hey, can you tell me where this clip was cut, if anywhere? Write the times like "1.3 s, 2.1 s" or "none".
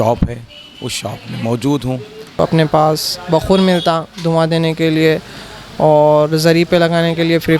2.4 s